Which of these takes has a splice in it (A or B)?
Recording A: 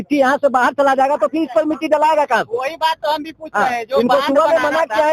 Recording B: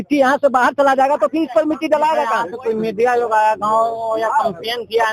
B